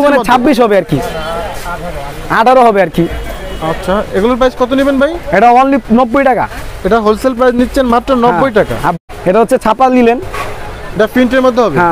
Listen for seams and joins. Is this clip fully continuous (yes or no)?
no